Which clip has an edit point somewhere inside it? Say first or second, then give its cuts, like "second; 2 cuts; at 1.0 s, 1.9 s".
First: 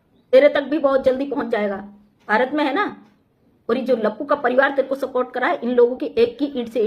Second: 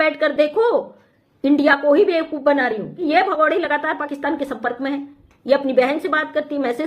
second; 1 cut; at 3.0 s